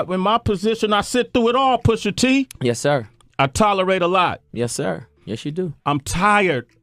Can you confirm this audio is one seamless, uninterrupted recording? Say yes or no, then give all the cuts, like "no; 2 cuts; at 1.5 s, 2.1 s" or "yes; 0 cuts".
yes; 0 cuts